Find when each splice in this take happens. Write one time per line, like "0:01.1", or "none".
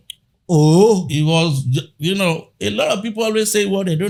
none